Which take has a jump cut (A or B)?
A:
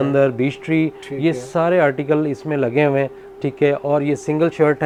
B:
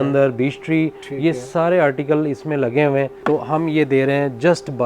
B